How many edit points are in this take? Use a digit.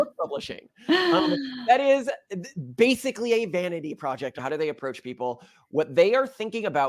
1